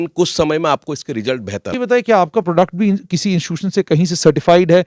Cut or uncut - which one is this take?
cut